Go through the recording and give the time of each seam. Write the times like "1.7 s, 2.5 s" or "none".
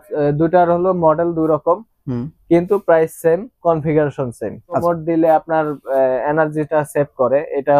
4.8 s